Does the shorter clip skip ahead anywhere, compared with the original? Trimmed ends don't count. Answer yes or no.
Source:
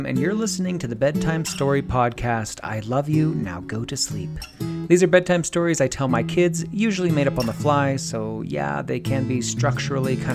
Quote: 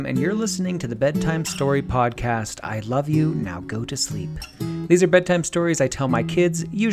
no